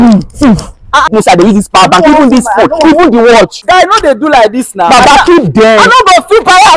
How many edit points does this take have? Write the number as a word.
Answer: two